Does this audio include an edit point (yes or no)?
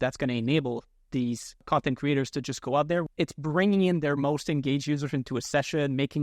yes